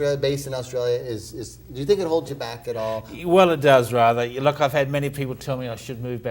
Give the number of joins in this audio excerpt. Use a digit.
1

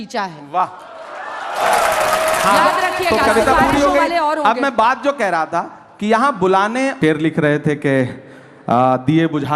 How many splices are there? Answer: 1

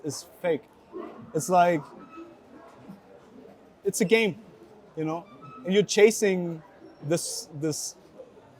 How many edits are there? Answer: 0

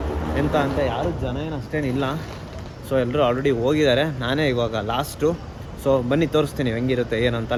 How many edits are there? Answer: 0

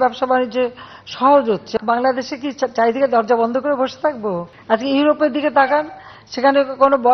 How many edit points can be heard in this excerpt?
2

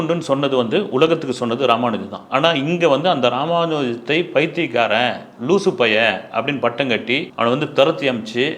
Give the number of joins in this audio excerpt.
1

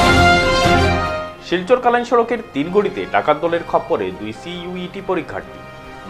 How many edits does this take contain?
0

